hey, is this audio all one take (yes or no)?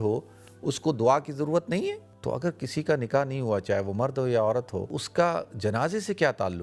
no